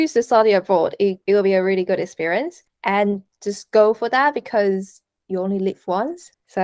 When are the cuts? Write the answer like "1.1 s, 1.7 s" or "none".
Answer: 1.2 s